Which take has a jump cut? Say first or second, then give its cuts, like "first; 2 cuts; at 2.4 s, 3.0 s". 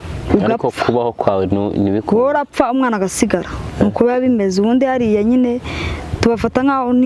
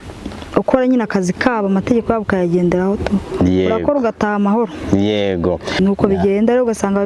second; 1 cut; at 5.8 s